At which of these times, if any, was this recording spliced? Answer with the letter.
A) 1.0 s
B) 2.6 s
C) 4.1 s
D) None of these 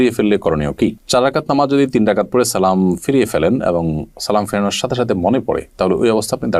D